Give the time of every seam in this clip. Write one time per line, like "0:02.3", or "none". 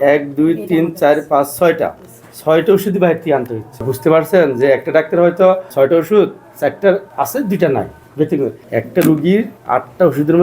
0:03.9
0:05.7
0:06.4
0:07.1
0:08.1
0:09.6